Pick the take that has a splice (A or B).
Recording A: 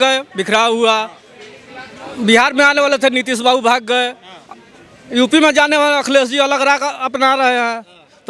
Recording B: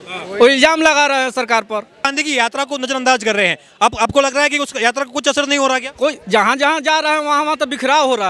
B